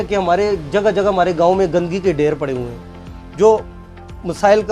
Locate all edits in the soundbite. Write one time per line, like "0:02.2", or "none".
none